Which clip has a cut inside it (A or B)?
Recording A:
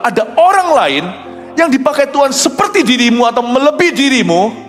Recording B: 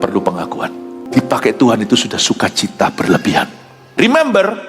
B